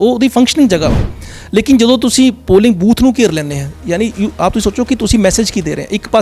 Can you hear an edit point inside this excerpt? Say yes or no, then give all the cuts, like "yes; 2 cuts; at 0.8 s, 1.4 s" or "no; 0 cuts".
no; 0 cuts